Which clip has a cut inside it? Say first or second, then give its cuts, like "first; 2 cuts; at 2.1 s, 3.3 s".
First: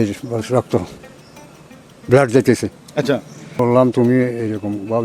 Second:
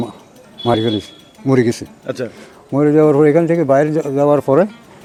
first; 1 cut; at 3.6 s